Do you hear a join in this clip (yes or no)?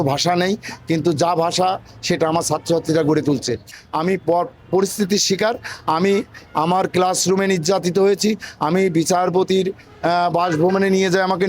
yes